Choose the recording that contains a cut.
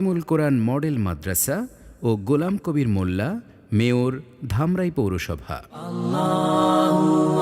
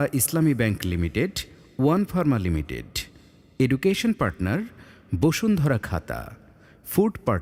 first; 1 cut; at 5.7 s

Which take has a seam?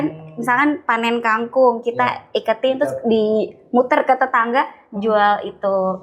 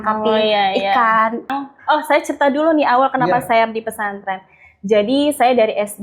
second; 1 cut; at 1.5 s

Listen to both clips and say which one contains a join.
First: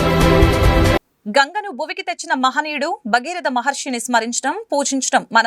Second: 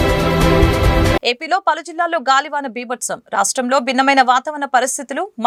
first; 1 cut; at 1.0 s

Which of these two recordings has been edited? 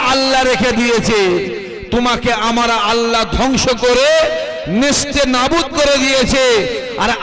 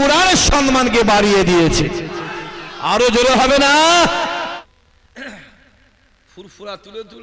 second; 1 cut; at 4.4 s

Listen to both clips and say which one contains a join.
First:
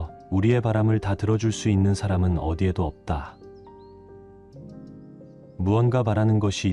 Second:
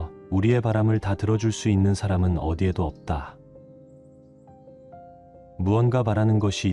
second; 2 cuts; at 3.4 s, 5.1 s

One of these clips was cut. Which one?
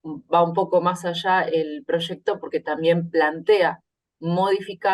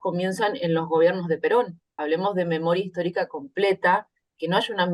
second; 1 cut; at 2.0 s

